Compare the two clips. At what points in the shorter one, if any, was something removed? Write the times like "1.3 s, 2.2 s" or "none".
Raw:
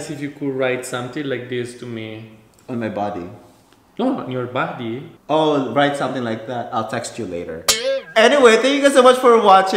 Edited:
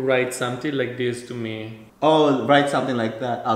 1.8 s